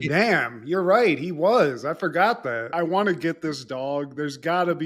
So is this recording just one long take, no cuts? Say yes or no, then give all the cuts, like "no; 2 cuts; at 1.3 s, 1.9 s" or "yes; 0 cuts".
no; 1 cut; at 2.7 s